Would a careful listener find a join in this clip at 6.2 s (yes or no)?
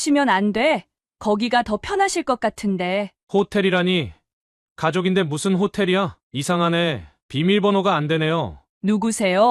yes